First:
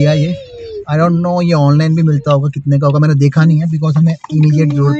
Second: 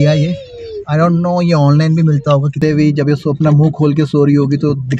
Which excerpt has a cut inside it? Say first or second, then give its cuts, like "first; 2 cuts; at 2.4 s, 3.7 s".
second; 1 cut; at 2.6 s